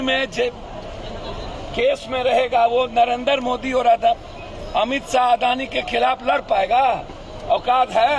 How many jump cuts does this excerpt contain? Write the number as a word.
zero